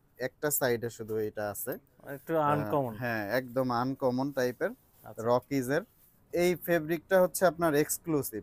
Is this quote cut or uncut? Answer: cut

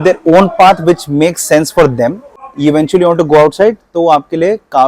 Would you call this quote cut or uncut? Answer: cut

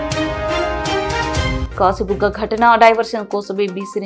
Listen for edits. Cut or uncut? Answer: uncut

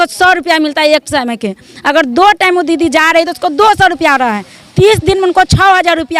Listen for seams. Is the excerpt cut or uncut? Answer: uncut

